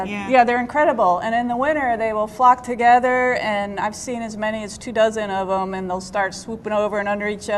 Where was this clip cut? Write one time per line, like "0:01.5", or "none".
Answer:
0:01.2